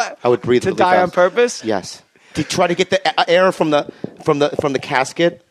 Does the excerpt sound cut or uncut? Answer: uncut